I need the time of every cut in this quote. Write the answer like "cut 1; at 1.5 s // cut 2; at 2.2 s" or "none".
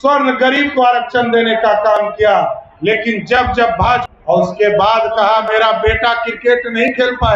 cut 1; at 4.1 s